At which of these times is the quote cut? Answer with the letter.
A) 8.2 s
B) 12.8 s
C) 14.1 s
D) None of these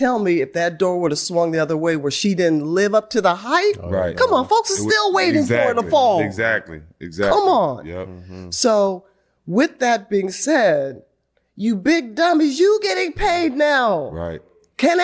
B